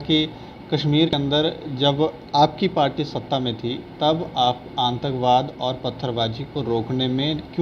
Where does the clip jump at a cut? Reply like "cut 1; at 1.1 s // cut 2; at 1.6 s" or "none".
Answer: cut 1; at 1.1 s